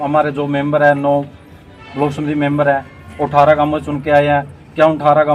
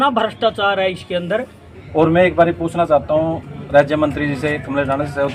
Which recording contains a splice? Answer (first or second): second